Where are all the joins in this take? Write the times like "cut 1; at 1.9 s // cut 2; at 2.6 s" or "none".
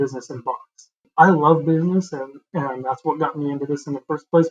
cut 1; at 1.0 s